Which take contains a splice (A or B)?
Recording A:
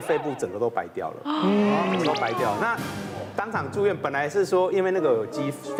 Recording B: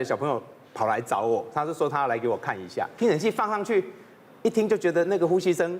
B